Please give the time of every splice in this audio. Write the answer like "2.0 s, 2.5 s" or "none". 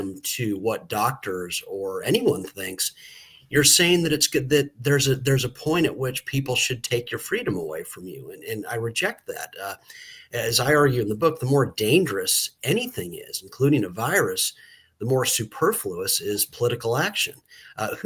none